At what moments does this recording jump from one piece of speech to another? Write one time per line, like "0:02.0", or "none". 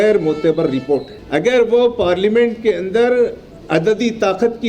0:01.2